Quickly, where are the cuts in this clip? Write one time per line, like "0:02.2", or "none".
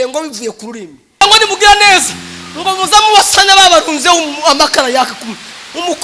0:01.2